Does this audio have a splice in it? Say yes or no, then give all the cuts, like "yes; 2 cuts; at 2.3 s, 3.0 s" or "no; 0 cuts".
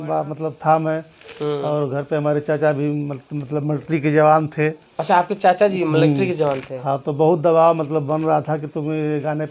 no; 0 cuts